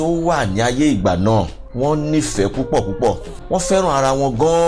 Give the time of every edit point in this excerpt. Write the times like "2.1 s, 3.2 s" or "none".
1.6 s, 3.3 s

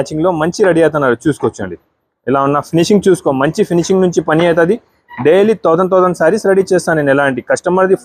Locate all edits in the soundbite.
none

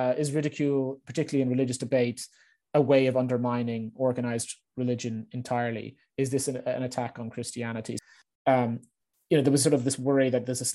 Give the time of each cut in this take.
8.0 s

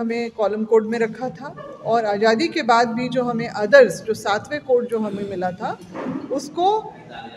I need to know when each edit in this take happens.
none

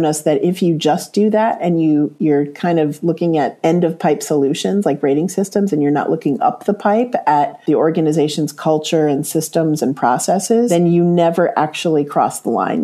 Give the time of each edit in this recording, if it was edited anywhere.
10.7 s

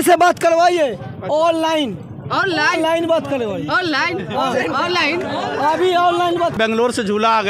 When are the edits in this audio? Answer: 6.6 s

